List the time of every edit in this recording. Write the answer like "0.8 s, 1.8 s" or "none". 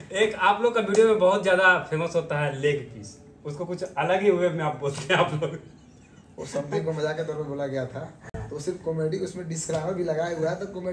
none